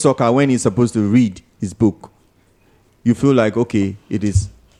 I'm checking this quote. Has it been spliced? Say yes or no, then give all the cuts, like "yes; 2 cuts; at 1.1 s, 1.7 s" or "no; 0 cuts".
no; 0 cuts